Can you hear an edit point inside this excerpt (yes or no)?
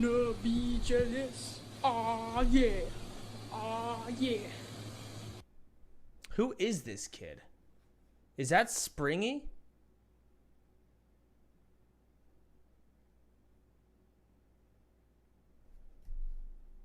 yes